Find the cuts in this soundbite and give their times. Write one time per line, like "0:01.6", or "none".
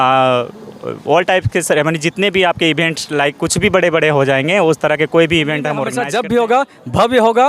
0:06.0